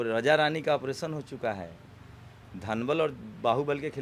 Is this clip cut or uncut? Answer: uncut